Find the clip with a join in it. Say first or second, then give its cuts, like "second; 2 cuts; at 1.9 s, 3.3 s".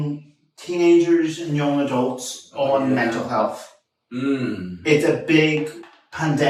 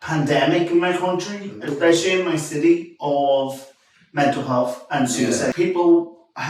second; 1 cut; at 5.5 s